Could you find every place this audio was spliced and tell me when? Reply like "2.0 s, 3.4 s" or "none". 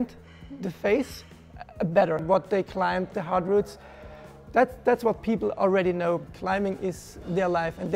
2.2 s, 6.2 s